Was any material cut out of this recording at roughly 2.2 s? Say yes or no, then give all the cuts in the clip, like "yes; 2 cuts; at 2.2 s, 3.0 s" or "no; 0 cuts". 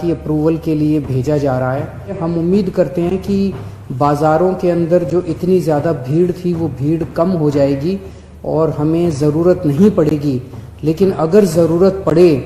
yes; 1 cut; at 2.2 s